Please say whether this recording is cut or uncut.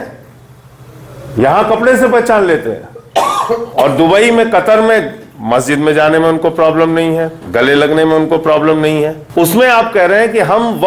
cut